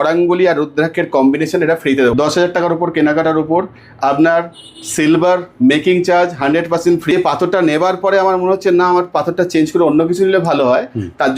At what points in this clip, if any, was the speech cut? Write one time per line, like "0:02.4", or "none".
0:02.1
0:07.1